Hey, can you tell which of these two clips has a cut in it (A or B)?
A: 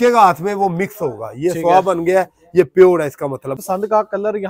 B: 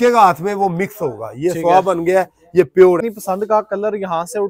B